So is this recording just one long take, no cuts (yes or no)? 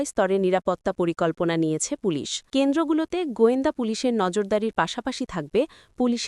no